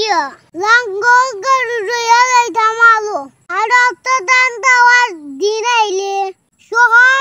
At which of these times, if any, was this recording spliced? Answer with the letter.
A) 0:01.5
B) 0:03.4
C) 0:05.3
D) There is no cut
B